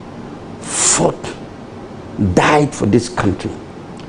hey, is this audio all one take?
yes; 0 cuts

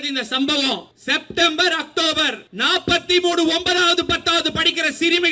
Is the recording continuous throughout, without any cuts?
no; 2 cuts; at 0.9 s, 2.5 s

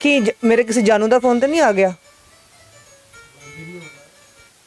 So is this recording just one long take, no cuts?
yes; 0 cuts

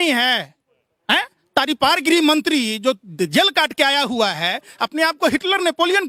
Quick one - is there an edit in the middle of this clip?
no; 0 cuts

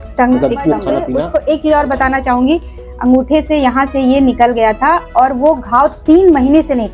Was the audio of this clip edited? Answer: yes; 1 cut; at 1.3 s

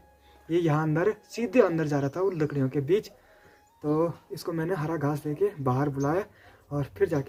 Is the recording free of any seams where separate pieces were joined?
yes; 0 cuts

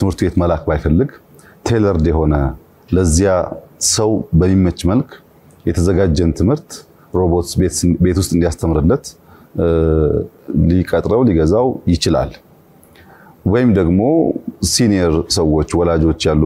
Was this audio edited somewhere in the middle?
no; 0 cuts

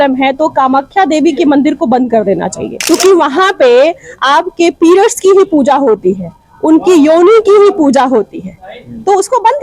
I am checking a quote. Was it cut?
yes; 1 cut; at 2.7 s

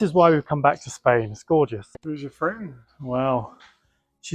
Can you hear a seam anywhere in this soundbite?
yes; 1 cut; at 1.8 s

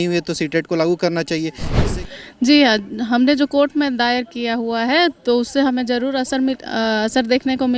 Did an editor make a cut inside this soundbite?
yes; 1 cut; at 1.8 s

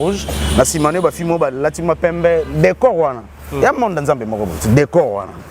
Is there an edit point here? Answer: no; 0 cuts

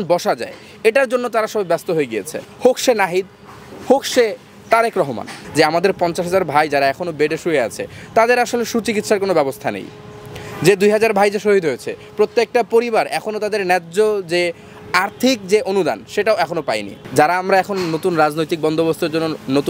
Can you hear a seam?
yes; 3 cuts; at 2.4 s, 5.4 s, 16.9 s

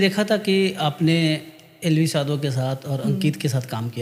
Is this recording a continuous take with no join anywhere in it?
yes; 0 cuts

